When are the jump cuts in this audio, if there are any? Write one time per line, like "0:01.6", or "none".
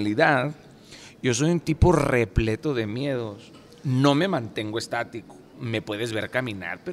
0:05.5